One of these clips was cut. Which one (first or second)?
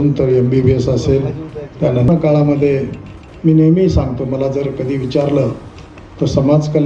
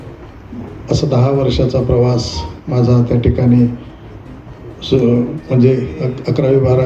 first